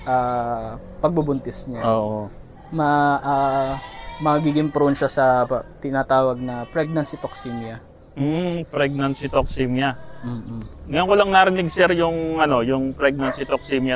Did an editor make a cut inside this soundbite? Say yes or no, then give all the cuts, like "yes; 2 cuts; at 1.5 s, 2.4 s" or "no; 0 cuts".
no; 0 cuts